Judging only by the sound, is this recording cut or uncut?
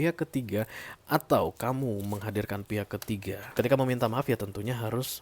cut